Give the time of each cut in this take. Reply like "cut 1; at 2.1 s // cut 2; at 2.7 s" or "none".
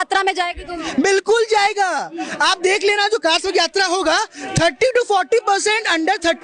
none